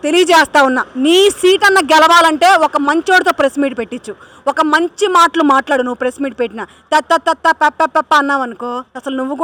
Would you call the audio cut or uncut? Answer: uncut